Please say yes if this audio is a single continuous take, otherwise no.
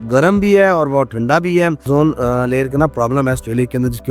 no